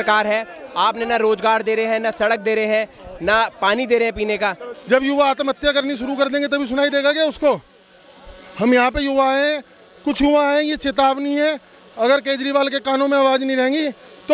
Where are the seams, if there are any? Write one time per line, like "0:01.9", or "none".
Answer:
0:04.7